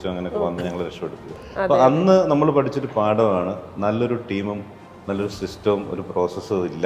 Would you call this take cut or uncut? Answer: cut